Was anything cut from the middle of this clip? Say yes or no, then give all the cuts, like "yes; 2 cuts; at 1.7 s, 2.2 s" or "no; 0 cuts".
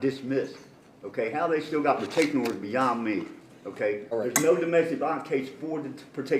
yes; 1 cut; at 4.1 s